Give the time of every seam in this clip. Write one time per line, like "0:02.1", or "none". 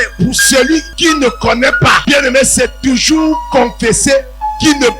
0:00.9
0:02.0